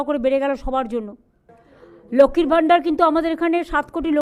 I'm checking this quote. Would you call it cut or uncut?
cut